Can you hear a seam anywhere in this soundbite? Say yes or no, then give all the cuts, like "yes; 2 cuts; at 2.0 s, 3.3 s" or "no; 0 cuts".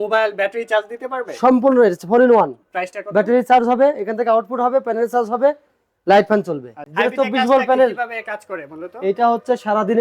yes; 1 cut; at 6.9 s